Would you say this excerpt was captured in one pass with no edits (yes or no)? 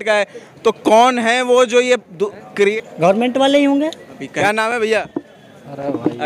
no